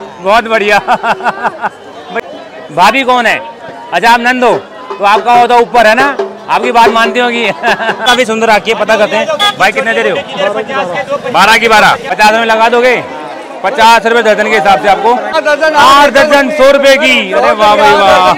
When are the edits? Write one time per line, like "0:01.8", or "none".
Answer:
0:02.1
0:08.0
0:12.1
0:15.3